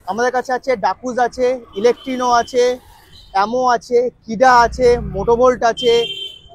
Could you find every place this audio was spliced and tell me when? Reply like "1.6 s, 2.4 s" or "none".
none